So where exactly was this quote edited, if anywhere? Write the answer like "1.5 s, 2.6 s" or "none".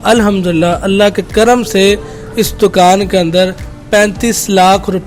none